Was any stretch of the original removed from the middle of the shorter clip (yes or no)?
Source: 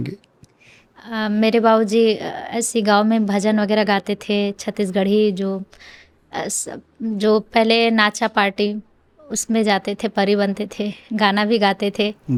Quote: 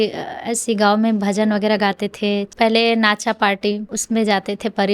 yes